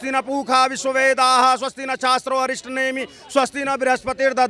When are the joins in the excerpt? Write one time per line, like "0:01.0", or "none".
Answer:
none